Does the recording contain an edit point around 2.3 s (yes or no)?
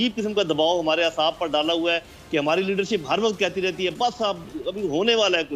no